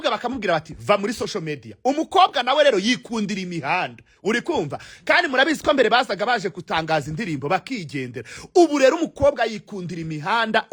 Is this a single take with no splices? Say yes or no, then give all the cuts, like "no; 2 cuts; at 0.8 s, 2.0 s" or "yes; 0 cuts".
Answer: yes; 0 cuts